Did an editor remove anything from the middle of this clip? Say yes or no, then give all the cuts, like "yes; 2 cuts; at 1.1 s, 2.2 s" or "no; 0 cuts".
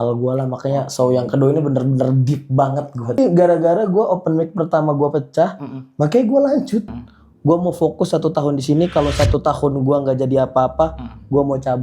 yes; 2 cuts; at 3.2 s, 6.9 s